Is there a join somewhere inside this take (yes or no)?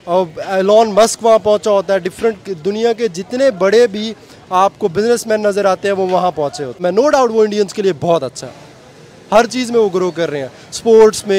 yes